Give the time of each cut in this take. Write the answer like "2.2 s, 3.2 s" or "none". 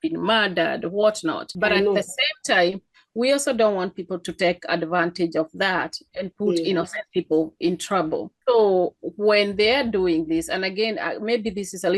1.5 s, 8.3 s